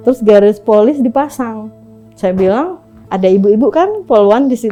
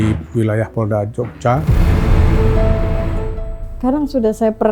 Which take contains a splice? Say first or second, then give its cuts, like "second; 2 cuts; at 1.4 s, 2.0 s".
second; 1 cut; at 3.5 s